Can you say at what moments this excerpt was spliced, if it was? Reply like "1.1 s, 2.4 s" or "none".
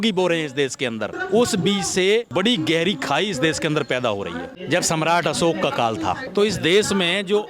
1.1 s, 2.3 s, 4.5 s, 6.2 s